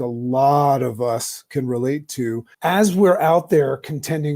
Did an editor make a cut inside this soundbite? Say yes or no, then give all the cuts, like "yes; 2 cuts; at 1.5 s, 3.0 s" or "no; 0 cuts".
yes; 1 cut; at 2.5 s